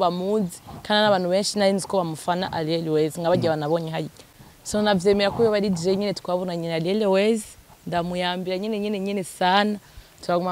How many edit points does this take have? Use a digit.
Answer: 1